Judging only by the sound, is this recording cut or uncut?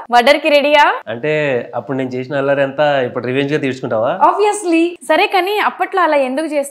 cut